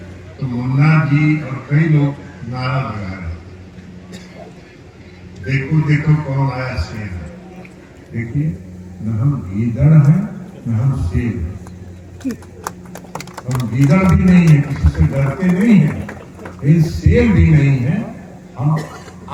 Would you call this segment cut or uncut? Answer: uncut